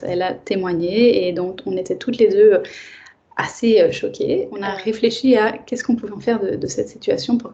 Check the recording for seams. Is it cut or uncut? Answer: cut